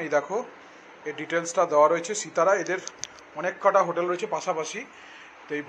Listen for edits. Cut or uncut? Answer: uncut